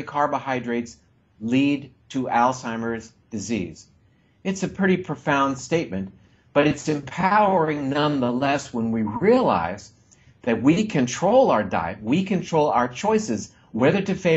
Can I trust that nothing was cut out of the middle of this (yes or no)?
yes